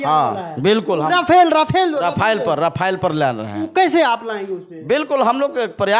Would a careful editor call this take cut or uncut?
uncut